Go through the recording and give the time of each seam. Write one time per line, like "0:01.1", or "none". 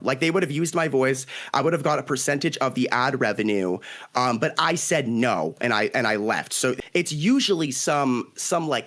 0:06.8